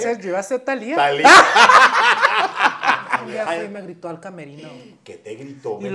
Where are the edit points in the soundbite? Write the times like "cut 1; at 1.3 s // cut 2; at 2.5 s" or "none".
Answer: cut 1; at 3.3 s